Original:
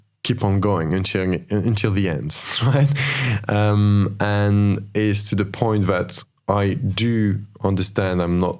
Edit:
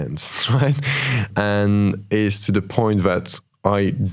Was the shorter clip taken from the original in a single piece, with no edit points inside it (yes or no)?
no